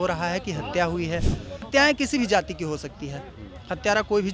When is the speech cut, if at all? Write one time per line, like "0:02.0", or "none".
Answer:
0:01.7